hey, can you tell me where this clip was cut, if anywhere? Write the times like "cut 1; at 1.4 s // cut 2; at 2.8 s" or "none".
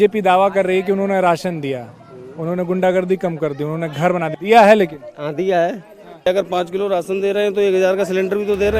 cut 1; at 4.3 s // cut 2; at 6.3 s